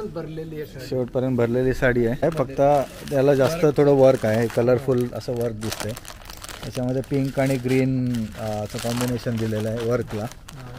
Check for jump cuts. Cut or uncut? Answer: cut